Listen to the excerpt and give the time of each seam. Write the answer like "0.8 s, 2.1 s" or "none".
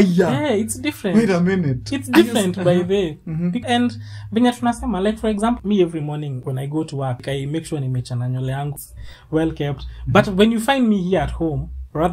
3.6 s, 5.6 s, 6.4 s, 7.2 s, 8.8 s